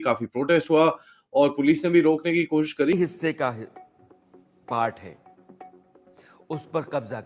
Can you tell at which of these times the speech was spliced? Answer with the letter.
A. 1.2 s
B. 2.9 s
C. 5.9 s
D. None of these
B